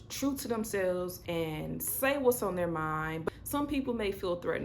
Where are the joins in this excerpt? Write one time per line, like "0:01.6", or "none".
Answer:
0:01.2
0:03.2